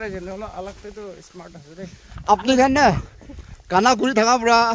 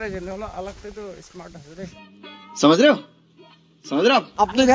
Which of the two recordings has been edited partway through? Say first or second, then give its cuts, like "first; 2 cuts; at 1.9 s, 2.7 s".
first; 1 cut; at 2.2 s